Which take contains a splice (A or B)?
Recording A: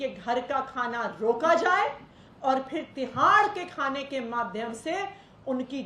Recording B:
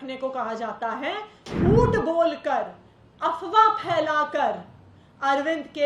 B